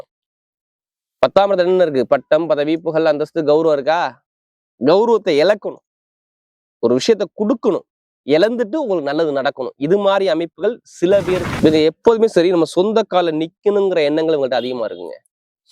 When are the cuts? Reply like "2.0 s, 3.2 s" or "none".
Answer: 11.5 s